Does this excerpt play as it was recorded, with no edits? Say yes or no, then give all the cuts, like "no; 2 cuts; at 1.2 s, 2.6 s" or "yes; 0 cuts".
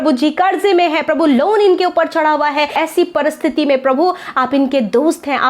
no; 1 cut; at 2.7 s